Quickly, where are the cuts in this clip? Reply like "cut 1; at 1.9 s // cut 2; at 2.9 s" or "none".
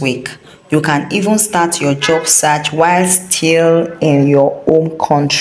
none